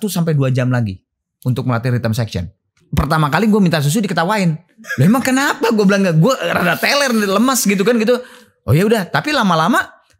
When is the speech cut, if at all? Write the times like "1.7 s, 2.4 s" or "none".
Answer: 2.8 s, 4.8 s